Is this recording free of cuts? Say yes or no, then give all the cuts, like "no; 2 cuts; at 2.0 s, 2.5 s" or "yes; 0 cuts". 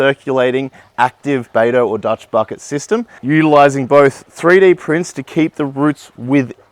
no; 1 cut; at 1.5 s